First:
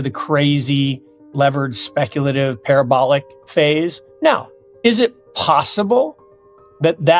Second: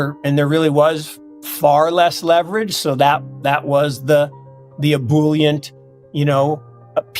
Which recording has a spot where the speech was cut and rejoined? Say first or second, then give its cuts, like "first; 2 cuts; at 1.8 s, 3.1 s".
first; 1 cut; at 4.0 s